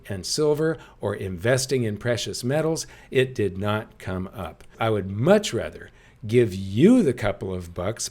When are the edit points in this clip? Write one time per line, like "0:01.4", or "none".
0:04.7

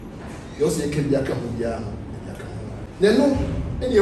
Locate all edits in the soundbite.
0:02.8

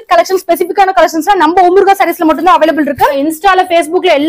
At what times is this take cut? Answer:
0:03.3

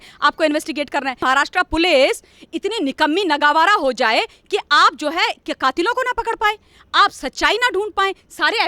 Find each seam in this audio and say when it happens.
0:01.2

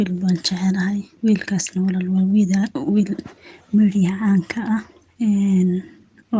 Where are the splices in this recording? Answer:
0:01.1
0:05.0

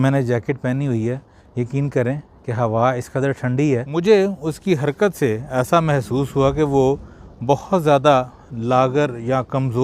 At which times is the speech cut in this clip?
0:03.9

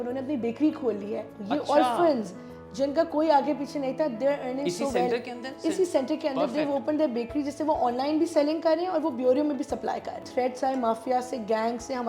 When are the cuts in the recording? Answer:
0:10.3

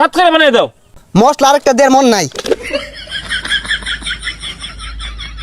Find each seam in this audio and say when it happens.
0:00.9
0:02.8

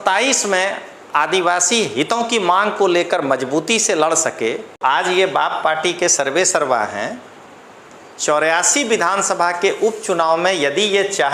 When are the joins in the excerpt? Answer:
0:04.8

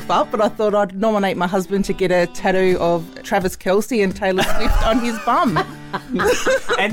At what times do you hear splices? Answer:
none

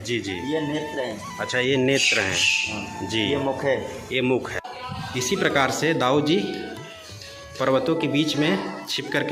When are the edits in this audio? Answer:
0:04.7

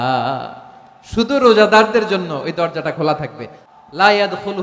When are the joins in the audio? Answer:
0:03.6

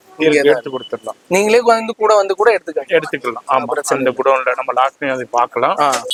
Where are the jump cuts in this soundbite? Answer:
none

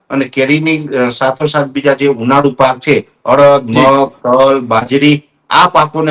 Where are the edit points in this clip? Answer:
none

